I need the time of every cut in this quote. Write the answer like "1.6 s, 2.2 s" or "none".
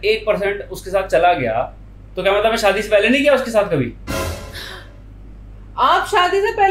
none